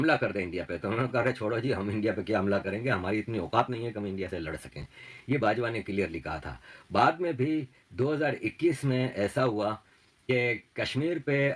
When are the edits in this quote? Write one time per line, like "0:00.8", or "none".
none